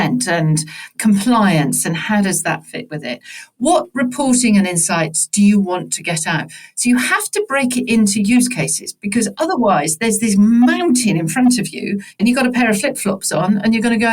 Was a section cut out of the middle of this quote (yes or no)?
yes